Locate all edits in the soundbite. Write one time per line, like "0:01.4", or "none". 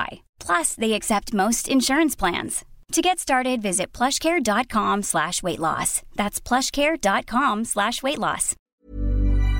0:08.5